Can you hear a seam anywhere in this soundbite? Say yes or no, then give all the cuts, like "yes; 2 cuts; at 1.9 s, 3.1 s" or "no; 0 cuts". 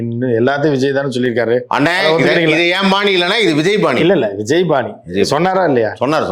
no; 0 cuts